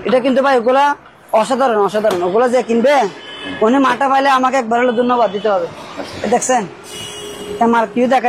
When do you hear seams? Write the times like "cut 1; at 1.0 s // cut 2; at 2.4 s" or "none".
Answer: none